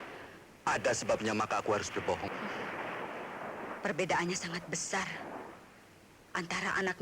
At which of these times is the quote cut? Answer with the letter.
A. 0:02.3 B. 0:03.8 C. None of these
A